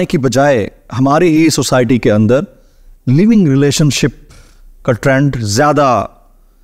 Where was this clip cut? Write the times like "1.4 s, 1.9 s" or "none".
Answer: none